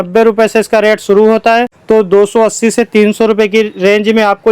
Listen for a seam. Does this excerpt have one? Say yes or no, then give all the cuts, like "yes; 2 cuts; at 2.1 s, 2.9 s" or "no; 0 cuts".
yes; 1 cut; at 1.8 s